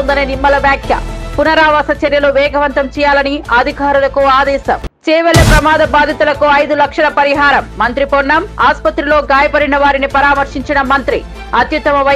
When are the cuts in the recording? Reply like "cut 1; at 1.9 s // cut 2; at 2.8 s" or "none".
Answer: cut 1; at 4.9 s

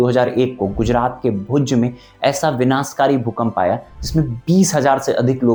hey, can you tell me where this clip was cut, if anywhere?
none

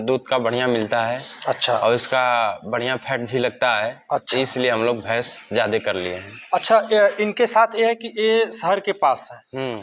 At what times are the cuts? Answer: none

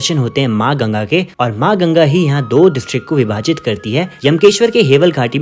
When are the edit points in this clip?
cut 1; at 1.4 s // cut 2; at 4.1 s

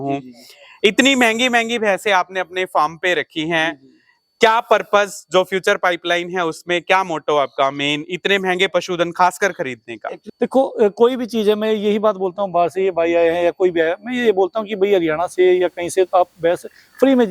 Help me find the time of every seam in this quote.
cut 1; at 10.2 s

